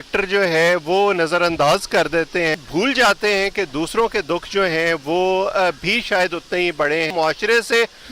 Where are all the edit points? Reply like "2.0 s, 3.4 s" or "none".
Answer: 2.6 s, 7.1 s